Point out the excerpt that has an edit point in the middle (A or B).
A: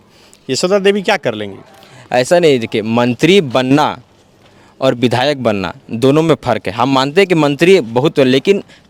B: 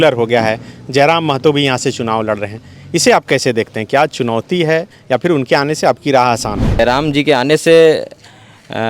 B